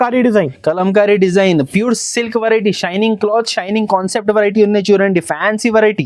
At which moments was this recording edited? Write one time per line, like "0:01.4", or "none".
none